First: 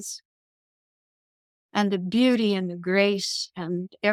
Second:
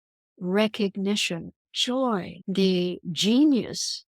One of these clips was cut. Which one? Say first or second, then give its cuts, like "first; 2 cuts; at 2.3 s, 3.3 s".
second; 1 cut; at 2.4 s